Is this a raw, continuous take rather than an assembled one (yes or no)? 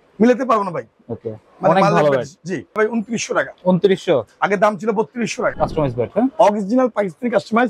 no